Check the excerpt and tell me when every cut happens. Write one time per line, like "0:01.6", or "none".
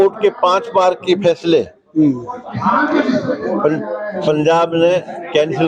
none